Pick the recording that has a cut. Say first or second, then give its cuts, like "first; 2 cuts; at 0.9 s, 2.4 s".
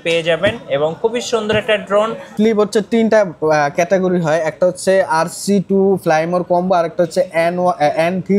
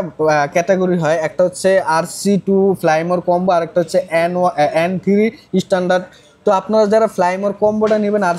first; 1 cut; at 2.3 s